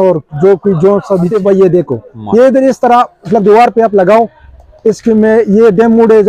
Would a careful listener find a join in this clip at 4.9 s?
no; 1 cut; at 1.3 s

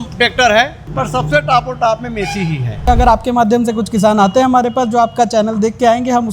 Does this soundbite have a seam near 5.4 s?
no; 1 cut; at 2.9 s

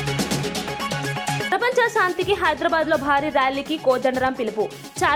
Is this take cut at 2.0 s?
no; 0 cuts

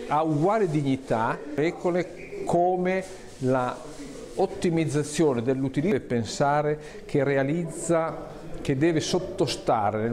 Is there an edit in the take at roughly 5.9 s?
yes; 2 cuts; at 1.6 s, 5.9 s

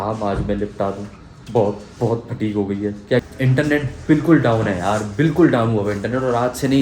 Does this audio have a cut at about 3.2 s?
yes; 1 cut; at 3.2 s

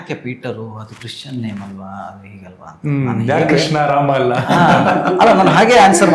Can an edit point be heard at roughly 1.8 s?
no; 0 cuts

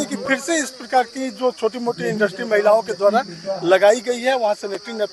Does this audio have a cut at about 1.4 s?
no; 0 cuts

